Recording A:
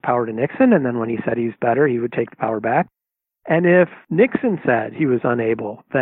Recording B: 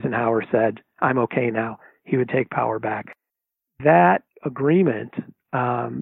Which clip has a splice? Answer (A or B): A